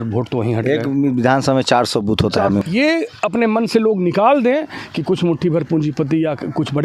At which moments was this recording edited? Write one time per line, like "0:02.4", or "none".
0:02.6